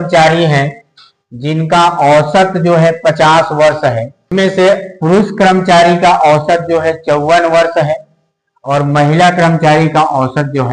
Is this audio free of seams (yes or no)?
no